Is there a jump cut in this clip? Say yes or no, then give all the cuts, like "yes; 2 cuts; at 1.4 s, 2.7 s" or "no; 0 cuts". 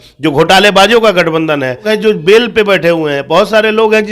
yes; 1 cut; at 1.9 s